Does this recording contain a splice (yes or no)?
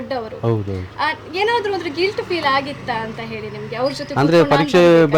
no